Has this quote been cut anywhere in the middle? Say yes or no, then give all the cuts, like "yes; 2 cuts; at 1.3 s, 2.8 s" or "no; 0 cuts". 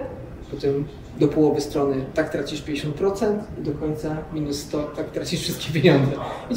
no; 0 cuts